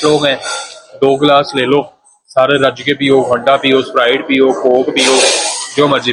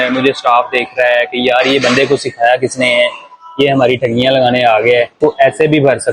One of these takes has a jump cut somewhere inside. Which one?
second; 1 cut; at 5.1 s

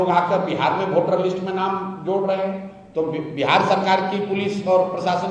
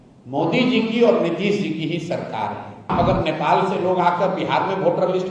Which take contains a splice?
second; 1 cut; at 2.9 s

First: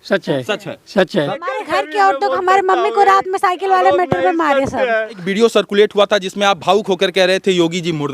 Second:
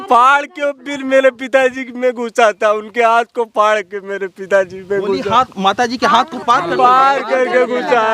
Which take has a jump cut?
first; 2 cuts; at 1.3 s, 5.2 s

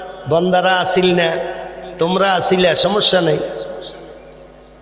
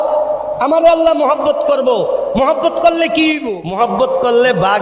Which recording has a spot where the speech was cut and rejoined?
second; 1 cut; at 3.5 s

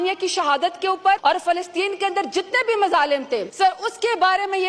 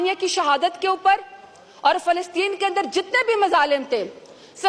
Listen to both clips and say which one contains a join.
first; 2 cuts; at 1.2 s, 3.5 s

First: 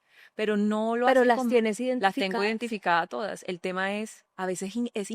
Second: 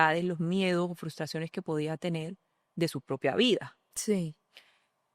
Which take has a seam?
first; 1 cut; at 4.2 s

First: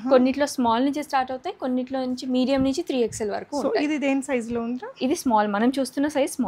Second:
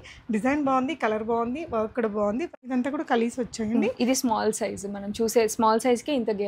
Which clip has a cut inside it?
second; 1 cut; at 2.5 s

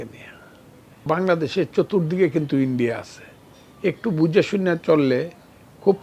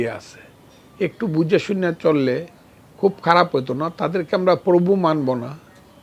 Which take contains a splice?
first; 1 cut; at 1.1 s

